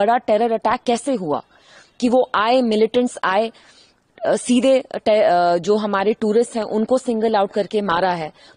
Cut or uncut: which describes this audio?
uncut